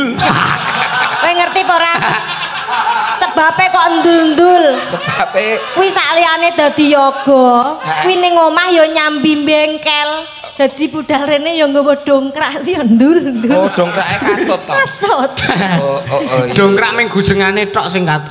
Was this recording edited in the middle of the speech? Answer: no; 0 cuts

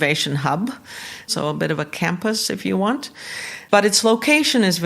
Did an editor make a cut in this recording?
yes; 2 cuts; at 1.3 s, 3.5 s

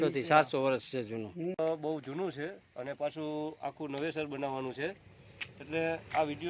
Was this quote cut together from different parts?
yes; 1 cut; at 1.6 s

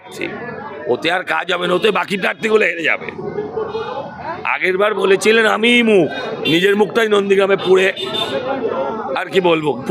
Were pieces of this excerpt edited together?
no; 0 cuts

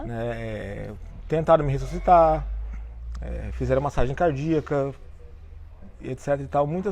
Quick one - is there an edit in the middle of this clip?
no; 0 cuts

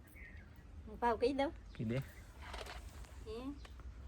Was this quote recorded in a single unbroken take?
yes; 0 cuts

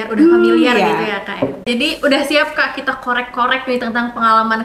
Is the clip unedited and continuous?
no; 1 cut; at 1.7 s

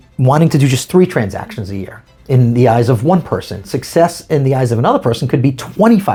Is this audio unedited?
yes; 0 cuts

